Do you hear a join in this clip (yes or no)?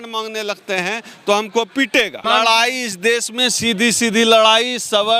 yes